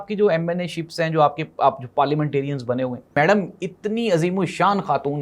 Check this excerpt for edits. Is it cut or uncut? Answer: cut